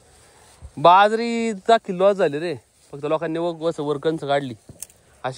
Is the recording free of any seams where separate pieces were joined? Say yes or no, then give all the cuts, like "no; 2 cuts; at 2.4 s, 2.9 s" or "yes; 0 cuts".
yes; 0 cuts